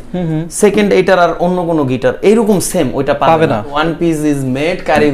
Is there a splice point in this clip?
yes; 1 cut; at 3.7 s

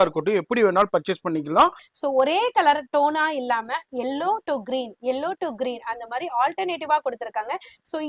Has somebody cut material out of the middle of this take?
yes; 1 cut; at 1.9 s

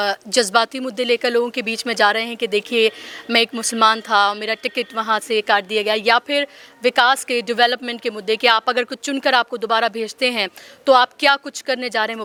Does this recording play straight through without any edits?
yes; 0 cuts

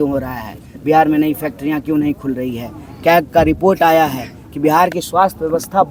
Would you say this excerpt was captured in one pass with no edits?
yes; 0 cuts

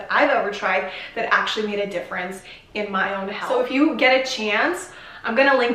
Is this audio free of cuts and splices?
yes; 0 cuts

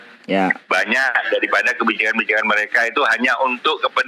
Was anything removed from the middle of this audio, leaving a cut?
no; 0 cuts

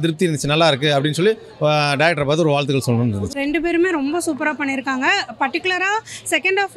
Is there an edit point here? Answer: yes; 1 cut; at 3.3 s

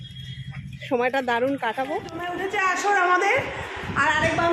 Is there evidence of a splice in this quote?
yes; 1 cut; at 2.4 s

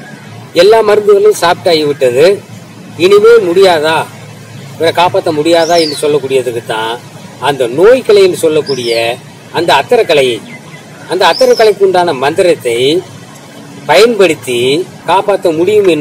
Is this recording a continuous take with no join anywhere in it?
no; 1 cut; at 14.9 s

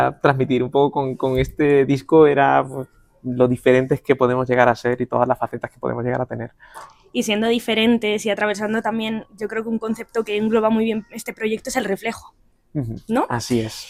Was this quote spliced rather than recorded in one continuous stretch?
no; 0 cuts

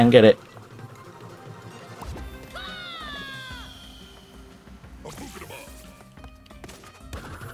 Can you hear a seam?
no; 0 cuts

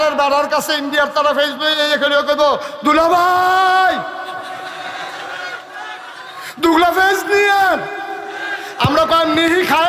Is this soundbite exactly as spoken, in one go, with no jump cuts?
yes; 0 cuts

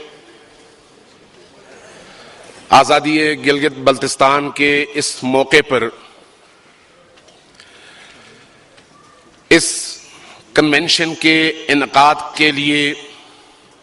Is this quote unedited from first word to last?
no; 1 cut; at 6.2 s

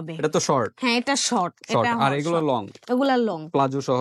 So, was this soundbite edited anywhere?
no; 0 cuts

